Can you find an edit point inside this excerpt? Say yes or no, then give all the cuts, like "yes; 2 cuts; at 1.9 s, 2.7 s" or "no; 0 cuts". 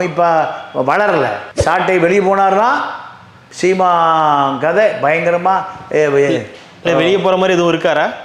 yes; 1 cut; at 1.5 s